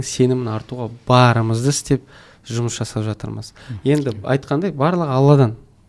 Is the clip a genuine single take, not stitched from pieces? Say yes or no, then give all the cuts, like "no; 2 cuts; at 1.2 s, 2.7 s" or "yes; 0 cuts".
yes; 0 cuts